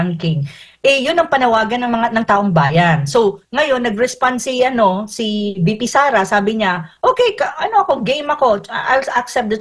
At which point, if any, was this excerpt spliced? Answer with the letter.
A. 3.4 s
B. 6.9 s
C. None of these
C